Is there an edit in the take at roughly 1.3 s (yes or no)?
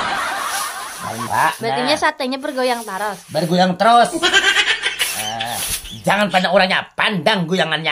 yes